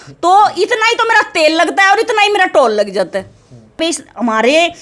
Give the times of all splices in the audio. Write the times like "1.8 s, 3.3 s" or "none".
3.8 s